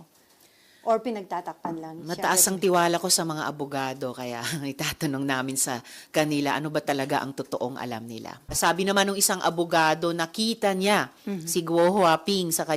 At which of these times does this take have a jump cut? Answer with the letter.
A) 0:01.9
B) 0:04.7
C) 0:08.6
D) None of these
C